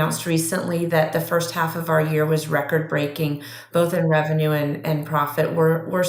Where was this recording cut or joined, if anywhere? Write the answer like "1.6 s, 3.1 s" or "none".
none